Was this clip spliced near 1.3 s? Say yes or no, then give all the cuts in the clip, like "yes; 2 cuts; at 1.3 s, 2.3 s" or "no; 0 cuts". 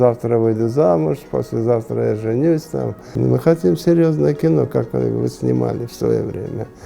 no; 1 cut; at 3.2 s